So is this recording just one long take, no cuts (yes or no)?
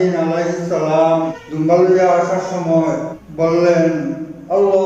no